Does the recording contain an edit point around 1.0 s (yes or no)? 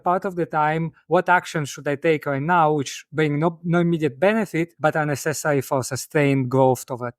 no